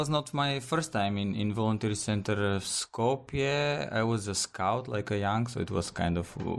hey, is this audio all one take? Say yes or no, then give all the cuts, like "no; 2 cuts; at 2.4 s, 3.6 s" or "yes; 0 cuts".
yes; 0 cuts